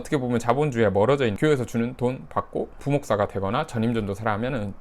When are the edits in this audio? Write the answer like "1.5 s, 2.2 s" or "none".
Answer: 1.4 s, 2.8 s

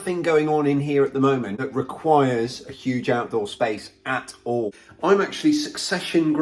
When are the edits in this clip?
1.6 s, 4.8 s

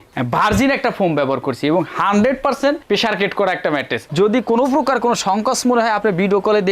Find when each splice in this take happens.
4.1 s

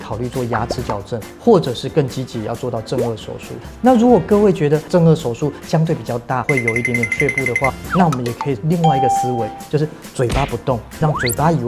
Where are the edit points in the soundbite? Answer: 3.7 s, 4.9 s

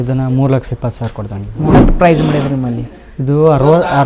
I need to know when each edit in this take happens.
1.8 s

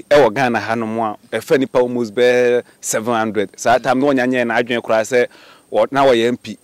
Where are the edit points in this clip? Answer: none

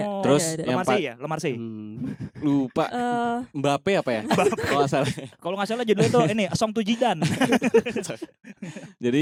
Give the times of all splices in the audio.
none

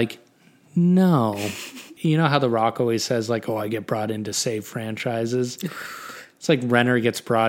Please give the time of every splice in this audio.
1.9 s

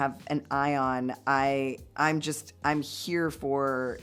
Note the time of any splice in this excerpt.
none

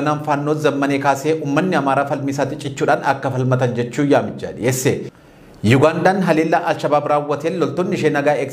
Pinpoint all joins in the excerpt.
5.1 s

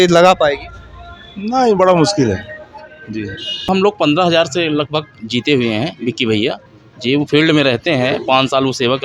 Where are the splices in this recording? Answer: 3.7 s

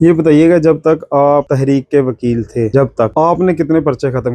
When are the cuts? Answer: 1.5 s, 2.9 s

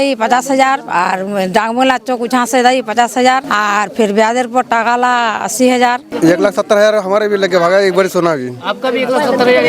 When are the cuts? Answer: 3.5 s, 6.1 s

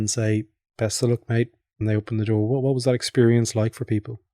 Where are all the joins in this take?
none

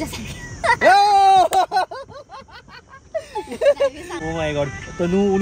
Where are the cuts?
4.1 s

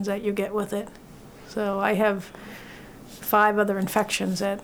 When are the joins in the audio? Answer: none

